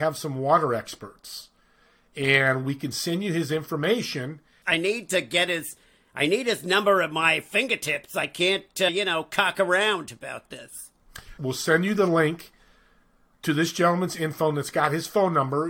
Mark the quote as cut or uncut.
cut